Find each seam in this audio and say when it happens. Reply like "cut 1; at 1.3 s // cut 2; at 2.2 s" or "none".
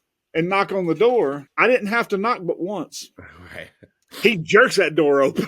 cut 1; at 1.5 s